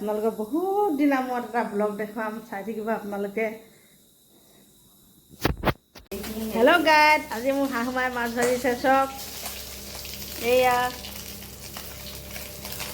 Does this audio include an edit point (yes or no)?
yes